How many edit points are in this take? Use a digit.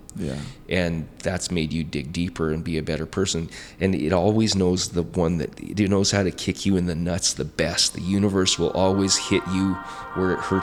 0